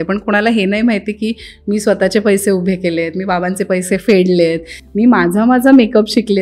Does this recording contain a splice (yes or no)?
no